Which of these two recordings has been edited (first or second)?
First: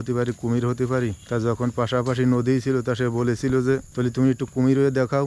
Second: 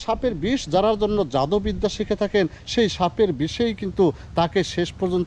first